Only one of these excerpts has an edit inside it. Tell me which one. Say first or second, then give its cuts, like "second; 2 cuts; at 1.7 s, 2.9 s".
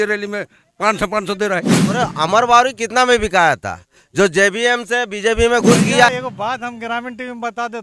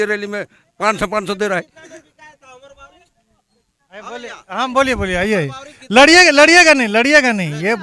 first; 2 cuts; at 1.9 s, 6.1 s